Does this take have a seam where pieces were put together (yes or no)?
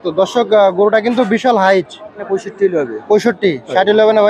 yes